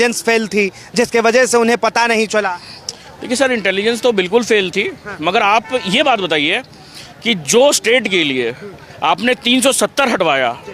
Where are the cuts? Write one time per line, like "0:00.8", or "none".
none